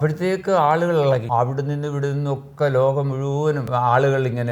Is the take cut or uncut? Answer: cut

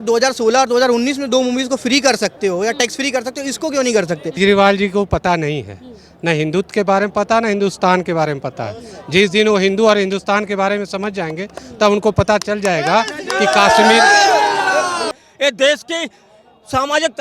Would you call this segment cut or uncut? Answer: cut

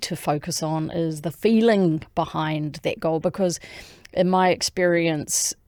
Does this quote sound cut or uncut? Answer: uncut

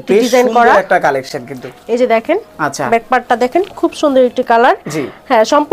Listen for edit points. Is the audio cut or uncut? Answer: uncut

